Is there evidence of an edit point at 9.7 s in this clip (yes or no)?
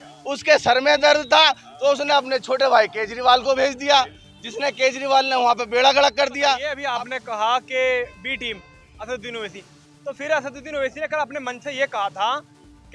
no